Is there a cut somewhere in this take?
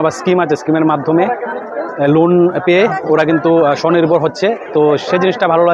no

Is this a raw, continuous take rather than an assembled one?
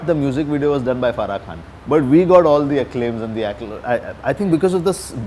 yes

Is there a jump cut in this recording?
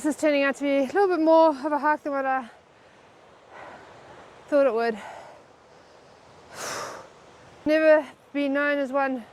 yes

